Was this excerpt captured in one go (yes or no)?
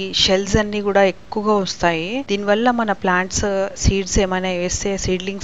yes